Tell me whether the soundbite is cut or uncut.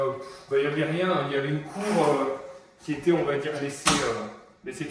uncut